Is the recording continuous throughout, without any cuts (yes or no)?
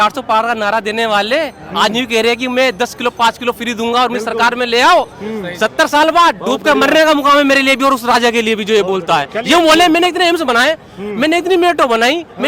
yes